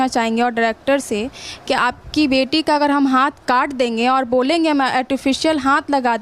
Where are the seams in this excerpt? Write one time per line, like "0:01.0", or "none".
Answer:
none